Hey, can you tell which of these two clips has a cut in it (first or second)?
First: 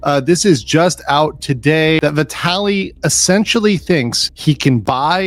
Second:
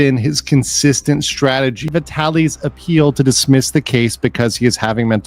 second